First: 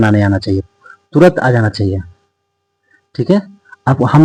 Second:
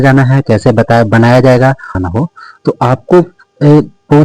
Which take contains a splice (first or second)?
second